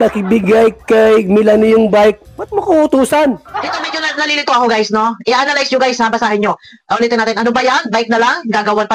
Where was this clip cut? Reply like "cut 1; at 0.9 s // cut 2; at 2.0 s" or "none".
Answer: cut 1; at 3.5 s